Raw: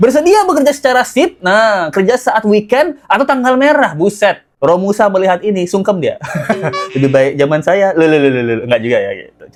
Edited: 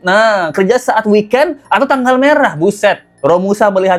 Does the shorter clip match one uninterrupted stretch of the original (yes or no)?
yes